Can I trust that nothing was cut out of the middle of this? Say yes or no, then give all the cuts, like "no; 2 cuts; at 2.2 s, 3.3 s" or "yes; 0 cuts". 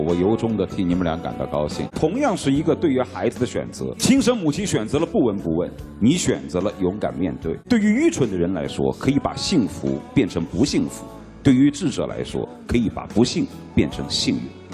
no; 2 cuts; at 1.9 s, 7.5 s